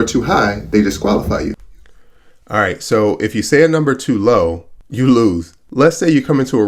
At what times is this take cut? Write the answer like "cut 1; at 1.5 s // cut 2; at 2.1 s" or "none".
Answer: none